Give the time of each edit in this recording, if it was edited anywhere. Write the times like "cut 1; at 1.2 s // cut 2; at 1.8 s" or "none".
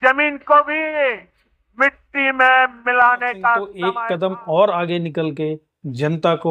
cut 1; at 3.8 s